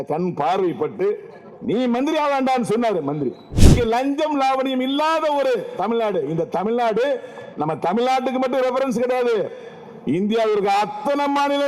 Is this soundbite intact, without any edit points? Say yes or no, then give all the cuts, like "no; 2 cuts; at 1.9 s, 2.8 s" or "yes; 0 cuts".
no; 1 cut; at 3.7 s